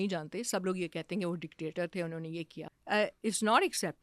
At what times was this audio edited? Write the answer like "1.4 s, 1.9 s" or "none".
2.7 s